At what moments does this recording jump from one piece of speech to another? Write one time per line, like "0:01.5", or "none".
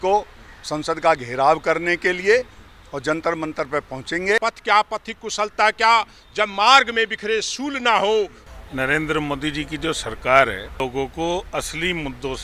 0:04.4
0:08.4
0:10.8

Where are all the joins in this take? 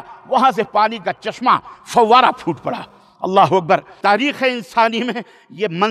0:03.9

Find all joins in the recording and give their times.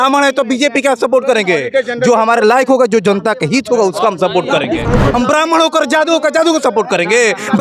0:04.8

